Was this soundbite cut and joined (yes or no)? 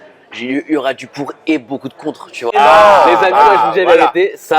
yes